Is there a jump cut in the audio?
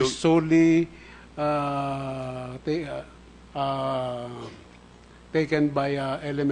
yes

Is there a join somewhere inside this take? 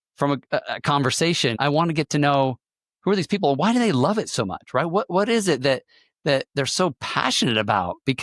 yes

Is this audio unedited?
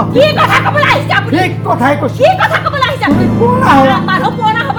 yes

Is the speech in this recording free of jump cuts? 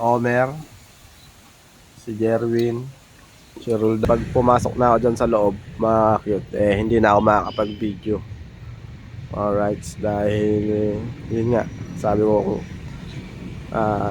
no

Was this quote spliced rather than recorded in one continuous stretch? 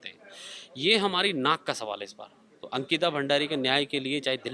no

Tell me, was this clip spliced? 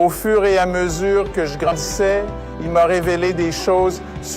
yes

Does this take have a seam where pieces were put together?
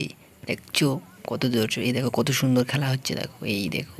no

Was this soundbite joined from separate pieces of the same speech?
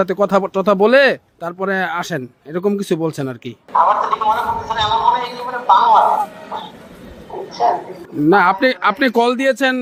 no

